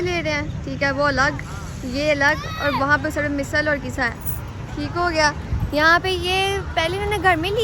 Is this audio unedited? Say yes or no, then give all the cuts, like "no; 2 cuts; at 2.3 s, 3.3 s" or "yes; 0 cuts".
yes; 0 cuts